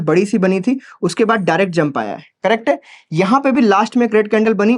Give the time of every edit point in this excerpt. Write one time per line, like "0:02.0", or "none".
none